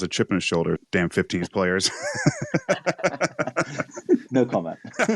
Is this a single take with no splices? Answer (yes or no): no